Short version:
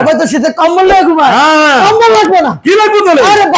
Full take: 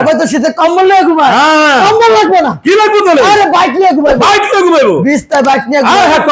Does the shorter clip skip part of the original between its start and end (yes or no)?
no